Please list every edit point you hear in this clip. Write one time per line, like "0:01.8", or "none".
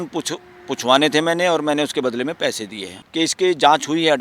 0:03.0

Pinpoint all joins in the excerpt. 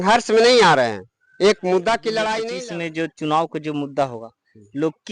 0:02.4

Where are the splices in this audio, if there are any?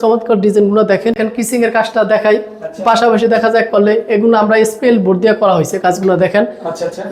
0:01.2

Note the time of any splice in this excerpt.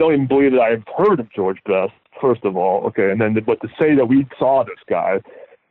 none

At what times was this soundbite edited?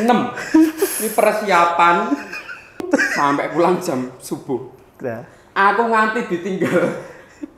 0:02.9

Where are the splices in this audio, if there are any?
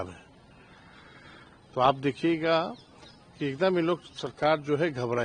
none

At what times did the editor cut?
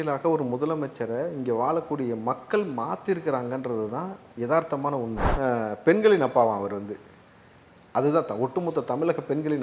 0:05.2

